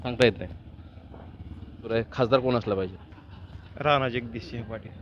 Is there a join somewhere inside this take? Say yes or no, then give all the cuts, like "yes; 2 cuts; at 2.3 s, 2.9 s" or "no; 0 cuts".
yes; 1 cut; at 1.9 s